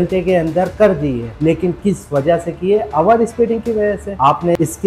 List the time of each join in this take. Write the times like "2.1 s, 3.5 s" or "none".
1.3 s